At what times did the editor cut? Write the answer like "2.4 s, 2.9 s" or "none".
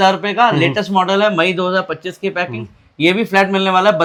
none